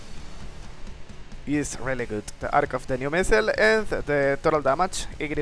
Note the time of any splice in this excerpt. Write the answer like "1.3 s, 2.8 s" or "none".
none